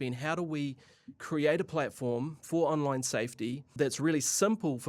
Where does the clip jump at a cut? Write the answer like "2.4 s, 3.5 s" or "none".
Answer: 3.7 s